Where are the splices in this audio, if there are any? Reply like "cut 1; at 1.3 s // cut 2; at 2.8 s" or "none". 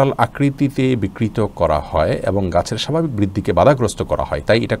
none